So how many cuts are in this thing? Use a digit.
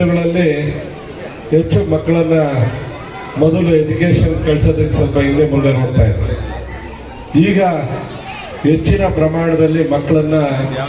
0